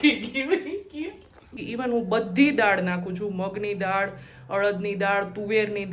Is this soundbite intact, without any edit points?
no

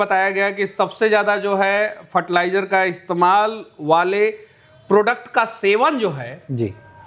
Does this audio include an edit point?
no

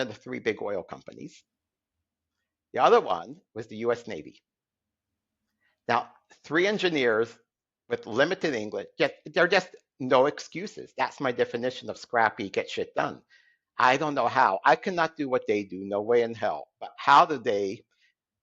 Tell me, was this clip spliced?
no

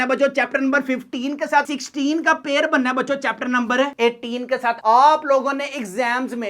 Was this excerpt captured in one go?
no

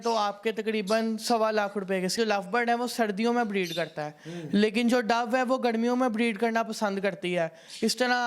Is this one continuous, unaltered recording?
no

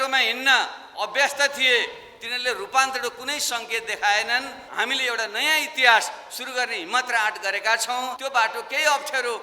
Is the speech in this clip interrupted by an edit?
yes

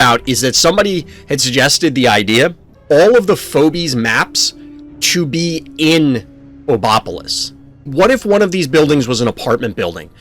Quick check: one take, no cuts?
no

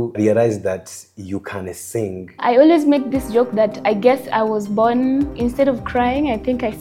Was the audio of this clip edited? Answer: no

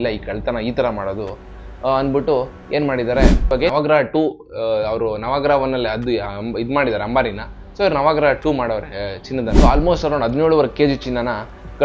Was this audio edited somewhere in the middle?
yes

